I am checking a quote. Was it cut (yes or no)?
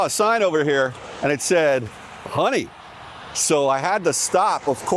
no